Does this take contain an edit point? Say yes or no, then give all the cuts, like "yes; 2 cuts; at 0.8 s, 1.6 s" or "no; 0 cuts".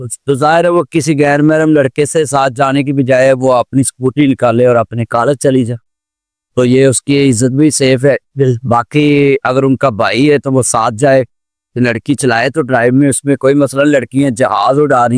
no; 0 cuts